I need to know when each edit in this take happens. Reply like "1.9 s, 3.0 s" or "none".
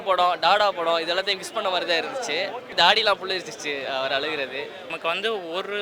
2.7 s, 4.9 s

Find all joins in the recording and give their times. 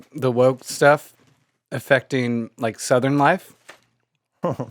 none

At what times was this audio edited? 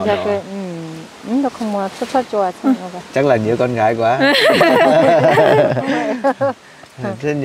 none

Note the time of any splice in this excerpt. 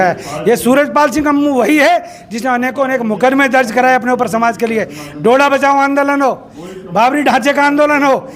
none

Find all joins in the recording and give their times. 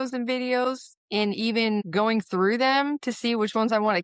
1.9 s

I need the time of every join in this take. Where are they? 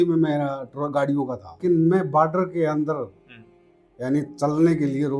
1.6 s

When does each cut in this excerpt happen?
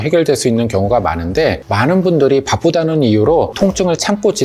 none

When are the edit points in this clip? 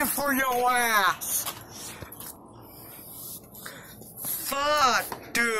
none

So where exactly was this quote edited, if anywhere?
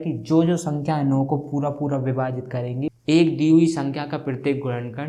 2.9 s

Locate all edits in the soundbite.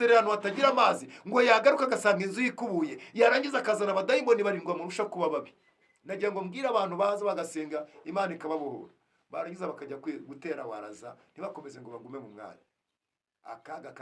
none

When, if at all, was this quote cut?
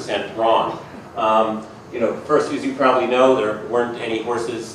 1.8 s

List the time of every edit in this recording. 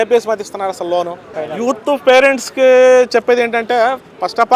1.3 s

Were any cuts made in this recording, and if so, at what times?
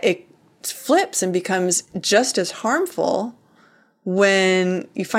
none

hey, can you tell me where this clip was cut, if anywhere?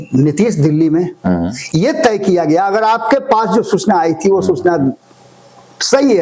none

